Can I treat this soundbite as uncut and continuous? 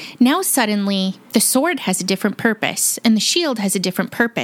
yes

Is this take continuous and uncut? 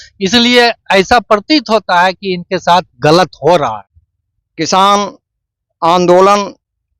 no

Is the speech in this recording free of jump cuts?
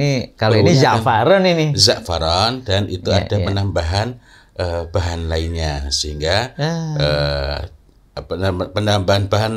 yes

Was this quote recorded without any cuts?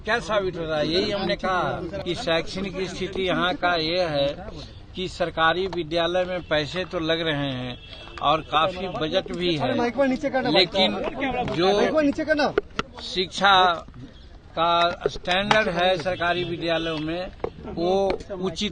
no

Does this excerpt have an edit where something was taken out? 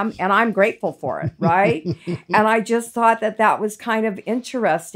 no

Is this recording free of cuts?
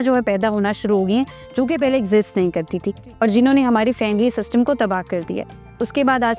yes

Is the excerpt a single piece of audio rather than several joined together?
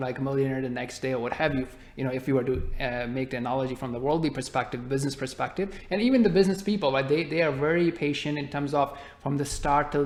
yes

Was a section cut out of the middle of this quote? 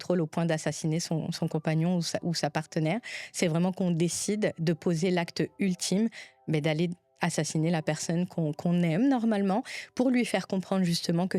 no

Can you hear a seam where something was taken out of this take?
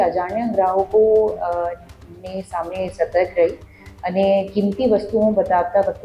no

